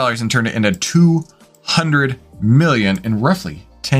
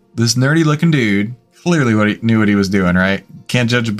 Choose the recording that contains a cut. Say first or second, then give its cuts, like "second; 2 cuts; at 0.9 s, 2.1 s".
second; 1 cut; at 1.4 s